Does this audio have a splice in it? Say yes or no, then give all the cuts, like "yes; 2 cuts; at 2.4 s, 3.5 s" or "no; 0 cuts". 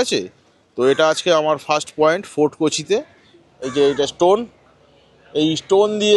yes; 1 cut; at 3.3 s